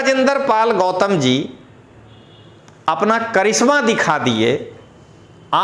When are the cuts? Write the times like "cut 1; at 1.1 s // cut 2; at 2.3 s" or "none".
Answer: none